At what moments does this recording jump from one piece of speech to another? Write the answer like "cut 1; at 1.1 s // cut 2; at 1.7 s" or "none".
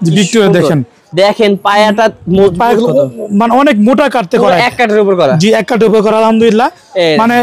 none

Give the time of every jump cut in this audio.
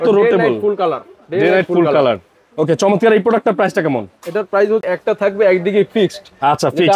cut 1; at 4.9 s

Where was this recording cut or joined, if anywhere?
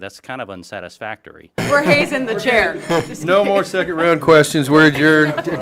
cut 1; at 1.6 s

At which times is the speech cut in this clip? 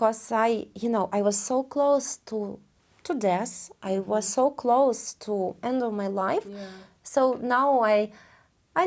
none

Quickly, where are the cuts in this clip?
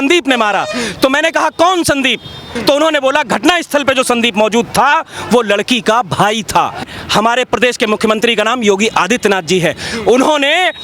cut 1; at 2.5 s // cut 2; at 6.9 s

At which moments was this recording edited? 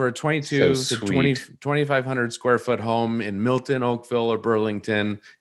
none

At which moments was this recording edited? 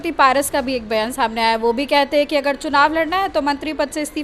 none

